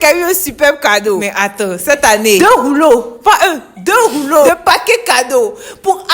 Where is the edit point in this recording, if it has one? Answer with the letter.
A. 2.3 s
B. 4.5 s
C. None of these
B